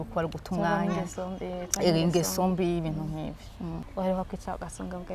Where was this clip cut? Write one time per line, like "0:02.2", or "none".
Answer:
0:03.8